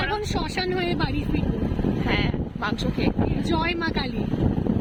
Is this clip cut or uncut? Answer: uncut